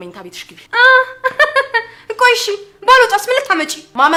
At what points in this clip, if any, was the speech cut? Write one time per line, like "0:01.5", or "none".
none